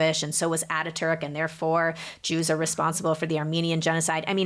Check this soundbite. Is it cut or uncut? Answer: uncut